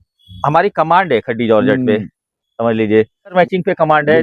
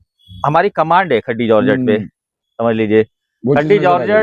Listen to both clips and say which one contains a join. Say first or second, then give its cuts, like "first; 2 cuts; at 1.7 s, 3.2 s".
first; 1 cut; at 3.3 s